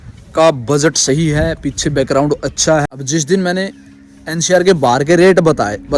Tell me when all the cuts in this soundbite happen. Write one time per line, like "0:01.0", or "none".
0:02.9